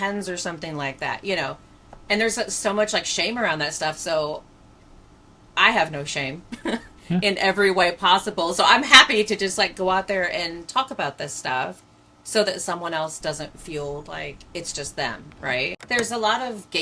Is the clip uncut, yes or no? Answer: no